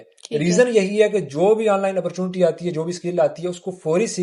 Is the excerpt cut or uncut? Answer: uncut